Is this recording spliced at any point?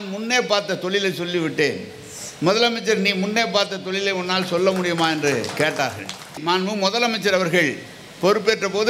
yes; 1 cut; at 6.4 s

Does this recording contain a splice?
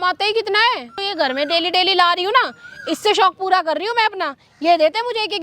yes; 1 cut; at 1.0 s

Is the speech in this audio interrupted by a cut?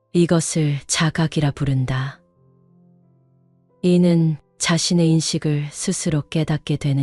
yes; 2 cuts; at 2.3 s, 3.8 s

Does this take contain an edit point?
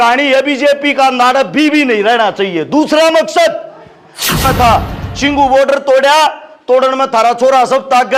yes; 1 cut; at 4.4 s

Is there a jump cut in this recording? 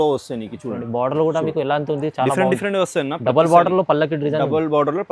no; 0 cuts

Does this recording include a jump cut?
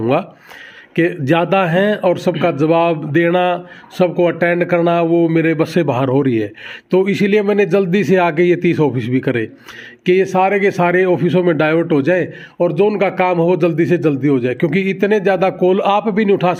no; 0 cuts

